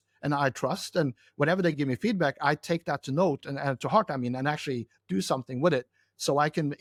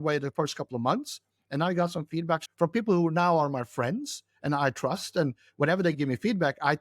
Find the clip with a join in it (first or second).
second